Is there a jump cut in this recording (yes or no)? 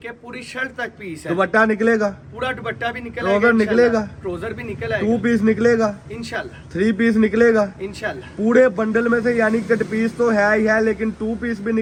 no